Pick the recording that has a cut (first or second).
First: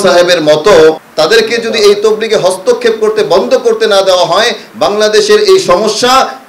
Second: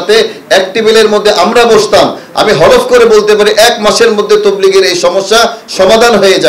first